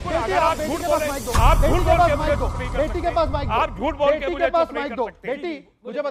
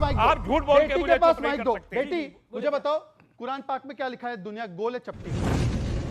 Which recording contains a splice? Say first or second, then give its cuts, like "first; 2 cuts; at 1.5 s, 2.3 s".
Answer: second; 1 cut; at 5.2 s